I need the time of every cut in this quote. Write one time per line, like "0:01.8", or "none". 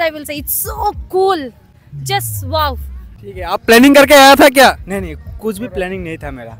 0:02.9